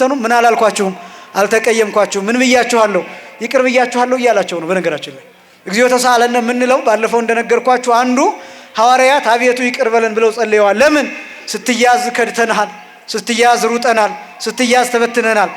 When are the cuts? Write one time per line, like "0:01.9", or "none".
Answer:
none